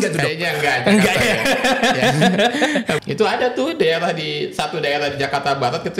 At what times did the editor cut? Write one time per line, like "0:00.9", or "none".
0:03.0